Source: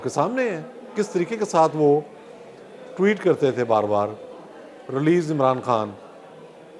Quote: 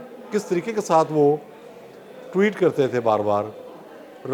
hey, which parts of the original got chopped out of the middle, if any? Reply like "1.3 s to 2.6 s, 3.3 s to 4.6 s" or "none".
none